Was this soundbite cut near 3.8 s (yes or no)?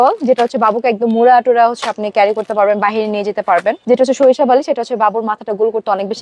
yes